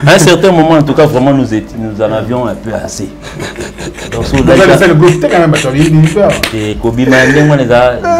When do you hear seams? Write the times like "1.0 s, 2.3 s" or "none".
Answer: none